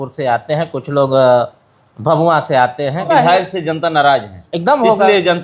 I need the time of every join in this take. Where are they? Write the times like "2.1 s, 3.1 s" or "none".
3.1 s